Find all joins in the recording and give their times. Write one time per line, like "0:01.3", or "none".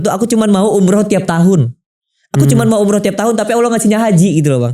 none